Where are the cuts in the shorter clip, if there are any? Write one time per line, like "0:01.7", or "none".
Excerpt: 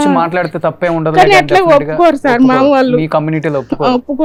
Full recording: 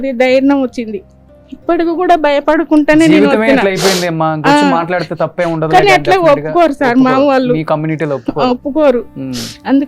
none